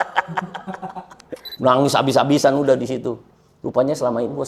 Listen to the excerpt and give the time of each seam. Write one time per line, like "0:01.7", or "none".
0:01.5